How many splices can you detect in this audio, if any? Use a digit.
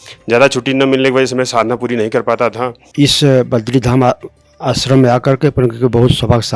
1